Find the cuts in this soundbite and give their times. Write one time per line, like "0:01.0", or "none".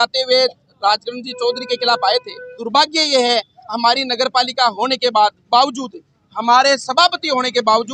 0:02.6